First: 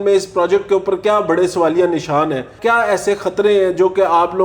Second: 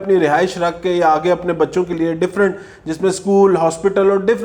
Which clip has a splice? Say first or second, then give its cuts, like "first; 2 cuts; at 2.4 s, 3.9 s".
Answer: first; 1 cut; at 2.5 s